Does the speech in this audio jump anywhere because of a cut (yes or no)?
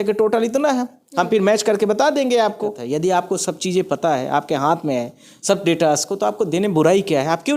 yes